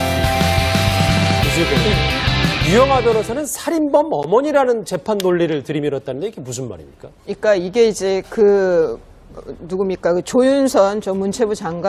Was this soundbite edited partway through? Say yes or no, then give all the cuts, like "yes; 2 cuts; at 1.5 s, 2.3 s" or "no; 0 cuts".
no; 0 cuts